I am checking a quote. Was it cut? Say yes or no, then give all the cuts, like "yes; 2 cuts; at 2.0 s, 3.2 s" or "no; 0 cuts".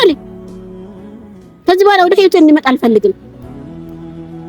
yes; 1 cut; at 3.3 s